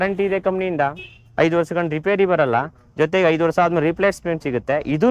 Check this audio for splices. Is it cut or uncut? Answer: uncut